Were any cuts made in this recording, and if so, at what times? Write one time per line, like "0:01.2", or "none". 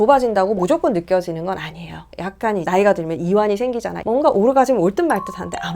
0:02.1
0:04.0